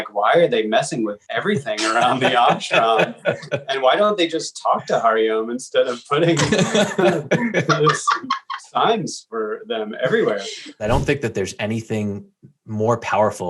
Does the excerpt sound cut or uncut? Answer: cut